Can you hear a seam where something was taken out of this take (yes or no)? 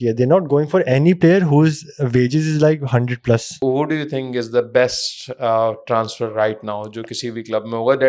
yes